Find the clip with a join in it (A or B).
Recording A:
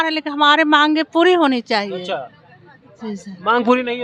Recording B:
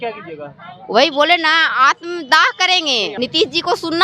B